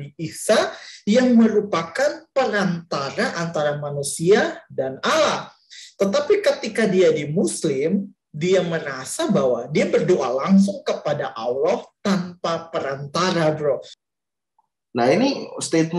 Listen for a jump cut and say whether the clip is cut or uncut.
cut